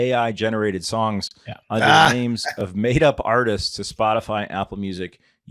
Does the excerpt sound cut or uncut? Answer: uncut